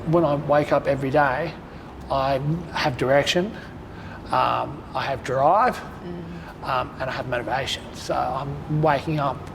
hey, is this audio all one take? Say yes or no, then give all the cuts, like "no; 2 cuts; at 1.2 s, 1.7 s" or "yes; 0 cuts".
yes; 0 cuts